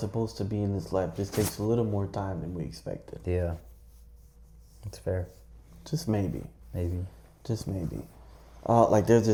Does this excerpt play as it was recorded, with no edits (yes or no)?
yes